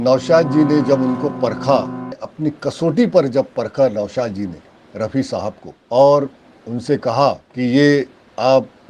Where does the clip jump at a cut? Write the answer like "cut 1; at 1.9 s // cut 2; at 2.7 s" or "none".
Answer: cut 1; at 2.2 s // cut 2; at 5.7 s // cut 3; at 7.5 s